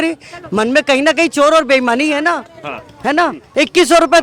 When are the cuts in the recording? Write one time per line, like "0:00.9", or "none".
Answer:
none